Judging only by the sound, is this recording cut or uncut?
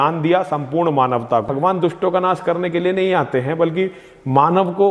cut